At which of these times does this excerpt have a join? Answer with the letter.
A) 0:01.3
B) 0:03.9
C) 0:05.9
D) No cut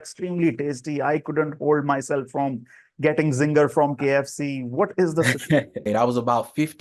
C